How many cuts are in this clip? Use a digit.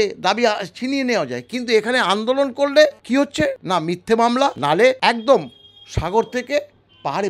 2